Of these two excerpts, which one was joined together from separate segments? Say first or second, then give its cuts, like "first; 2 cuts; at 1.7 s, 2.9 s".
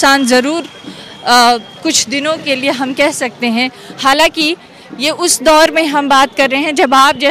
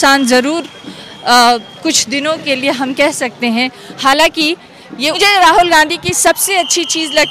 second; 1 cut; at 5.2 s